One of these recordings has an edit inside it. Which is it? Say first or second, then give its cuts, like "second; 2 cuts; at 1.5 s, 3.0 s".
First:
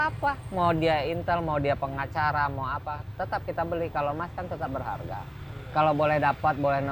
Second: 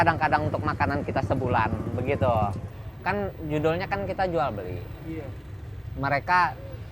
second; 1 cut; at 2.6 s